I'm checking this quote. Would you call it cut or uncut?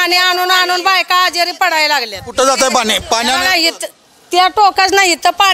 uncut